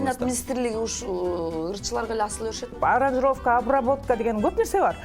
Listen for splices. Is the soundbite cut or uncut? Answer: cut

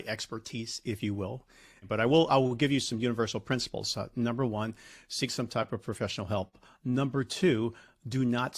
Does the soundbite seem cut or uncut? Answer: cut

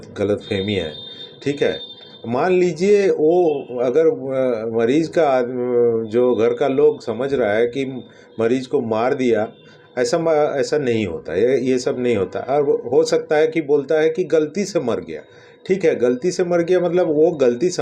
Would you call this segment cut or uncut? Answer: uncut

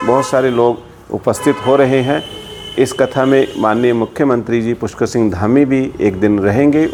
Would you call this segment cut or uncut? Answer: uncut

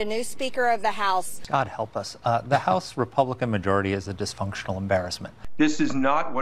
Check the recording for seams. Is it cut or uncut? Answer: cut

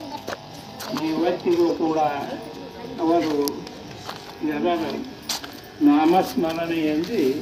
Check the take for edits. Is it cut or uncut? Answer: uncut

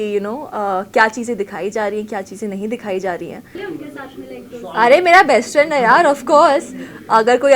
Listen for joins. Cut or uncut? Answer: cut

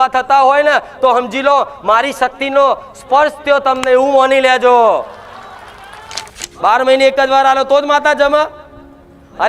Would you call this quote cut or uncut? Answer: cut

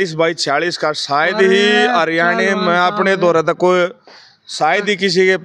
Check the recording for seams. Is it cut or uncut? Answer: uncut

